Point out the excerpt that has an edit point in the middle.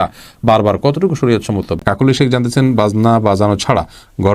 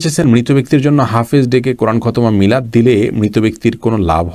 first; 1 cut; at 1.7 s

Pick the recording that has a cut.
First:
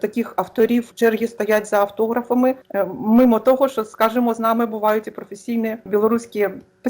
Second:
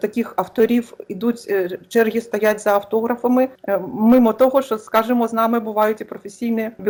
first; 1 cut; at 0.9 s

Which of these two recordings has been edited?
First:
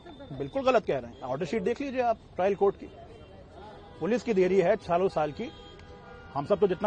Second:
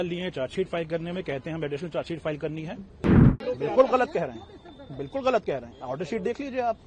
second; 1 cut; at 3.3 s

